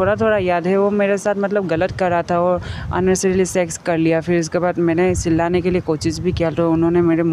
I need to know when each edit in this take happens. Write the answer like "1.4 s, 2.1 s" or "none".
none